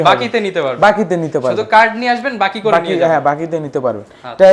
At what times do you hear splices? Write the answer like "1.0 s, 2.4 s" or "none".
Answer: none